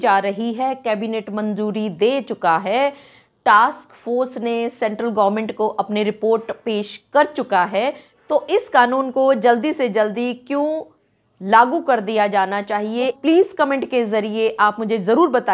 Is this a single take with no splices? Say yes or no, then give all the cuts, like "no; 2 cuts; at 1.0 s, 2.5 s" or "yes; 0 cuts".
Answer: no; 2 cuts; at 8.1 s, 13.2 s